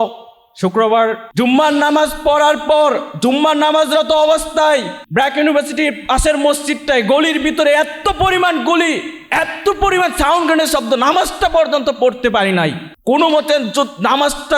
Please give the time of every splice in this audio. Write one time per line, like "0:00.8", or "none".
0:01.2
0:05.0
0:12.9